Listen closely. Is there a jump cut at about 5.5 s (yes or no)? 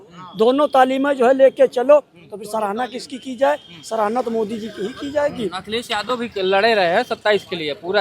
no